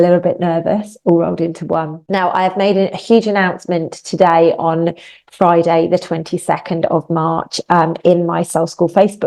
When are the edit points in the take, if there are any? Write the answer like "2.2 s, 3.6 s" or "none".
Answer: 2.0 s